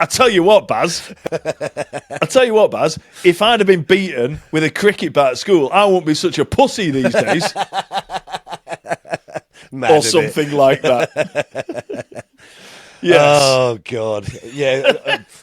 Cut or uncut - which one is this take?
uncut